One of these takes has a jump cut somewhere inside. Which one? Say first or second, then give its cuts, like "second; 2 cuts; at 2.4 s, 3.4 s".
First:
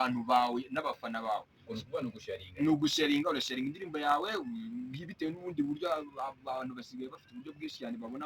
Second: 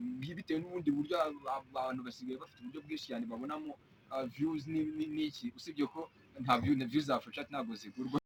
first; 1 cut; at 3.8 s